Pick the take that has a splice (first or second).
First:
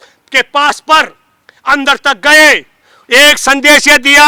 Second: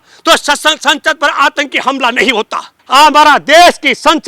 second